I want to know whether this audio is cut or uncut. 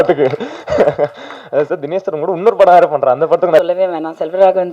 cut